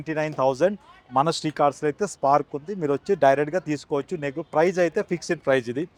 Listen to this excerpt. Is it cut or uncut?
uncut